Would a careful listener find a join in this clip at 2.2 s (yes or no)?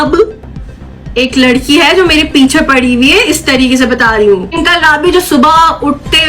no